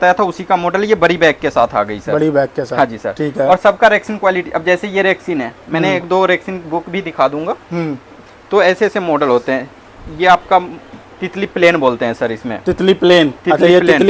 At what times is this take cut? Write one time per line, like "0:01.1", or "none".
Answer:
none